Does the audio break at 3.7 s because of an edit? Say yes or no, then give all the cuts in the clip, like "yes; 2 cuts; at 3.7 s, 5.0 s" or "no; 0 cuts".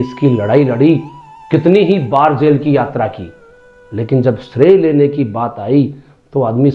no; 0 cuts